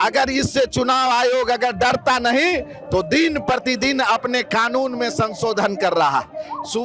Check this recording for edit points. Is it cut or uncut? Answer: uncut